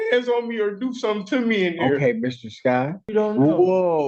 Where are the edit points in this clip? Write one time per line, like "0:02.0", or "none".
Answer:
0:03.0